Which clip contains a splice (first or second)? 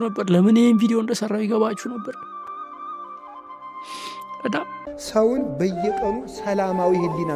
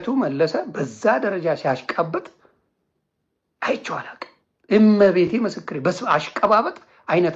first